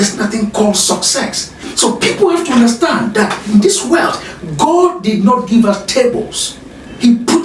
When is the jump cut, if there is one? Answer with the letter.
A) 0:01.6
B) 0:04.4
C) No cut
A